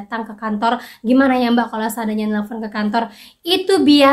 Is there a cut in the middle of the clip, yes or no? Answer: no